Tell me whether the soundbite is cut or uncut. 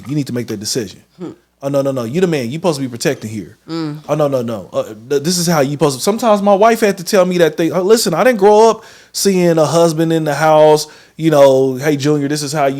uncut